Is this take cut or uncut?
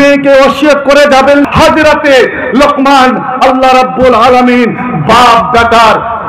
cut